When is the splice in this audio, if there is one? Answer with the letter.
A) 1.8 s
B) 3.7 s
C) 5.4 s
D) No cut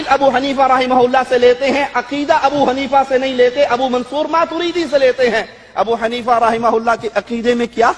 D